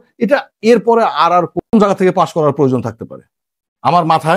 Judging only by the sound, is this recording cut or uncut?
cut